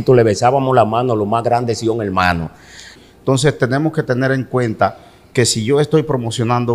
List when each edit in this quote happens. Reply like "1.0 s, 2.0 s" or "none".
2.9 s

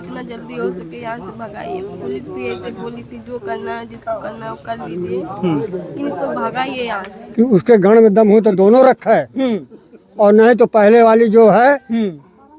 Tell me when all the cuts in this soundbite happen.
7.1 s

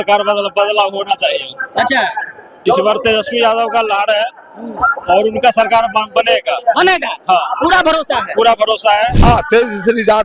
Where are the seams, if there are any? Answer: 9.2 s

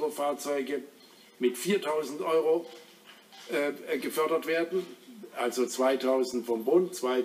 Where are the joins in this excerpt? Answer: 1.9 s

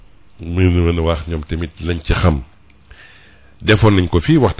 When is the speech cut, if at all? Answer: none

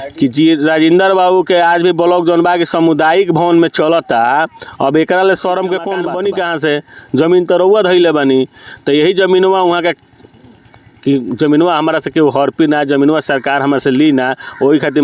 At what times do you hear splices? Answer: 6.0 s

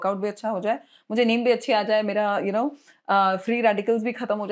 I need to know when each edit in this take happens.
none

